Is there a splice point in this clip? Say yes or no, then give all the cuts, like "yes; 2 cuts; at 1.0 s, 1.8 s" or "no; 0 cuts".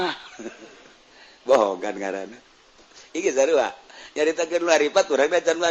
no; 0 cuts